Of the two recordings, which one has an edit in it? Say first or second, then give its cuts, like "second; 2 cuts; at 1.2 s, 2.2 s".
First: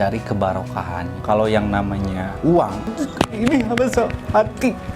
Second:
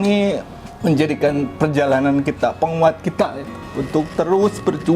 first; 2 cuts; at 1.1 s, 2.8 s